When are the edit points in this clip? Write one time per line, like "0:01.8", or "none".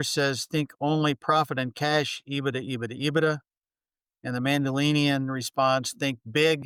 none